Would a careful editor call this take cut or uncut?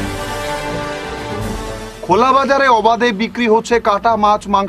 cut